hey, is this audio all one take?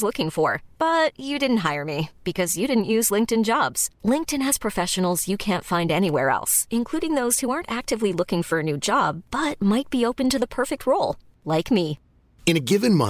yes; 0 cuts

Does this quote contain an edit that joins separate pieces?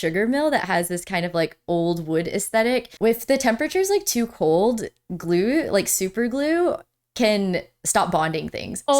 yes; 1 cut; at 2.9 s

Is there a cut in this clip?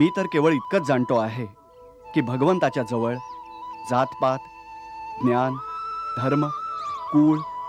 no; 0 cuts

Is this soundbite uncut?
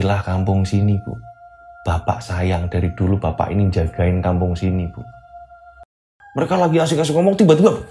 no; 1 cut; at 5.8 s

